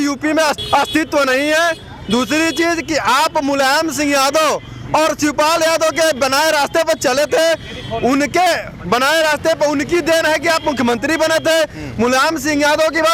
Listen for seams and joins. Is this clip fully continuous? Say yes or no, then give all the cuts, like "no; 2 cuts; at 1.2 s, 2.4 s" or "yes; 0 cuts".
yes; 0 cuts